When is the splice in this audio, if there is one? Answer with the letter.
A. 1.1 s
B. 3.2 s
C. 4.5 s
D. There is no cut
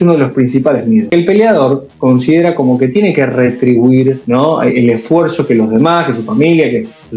A